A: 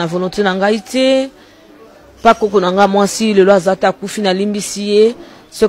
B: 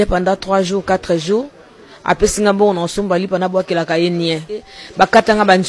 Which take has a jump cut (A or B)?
B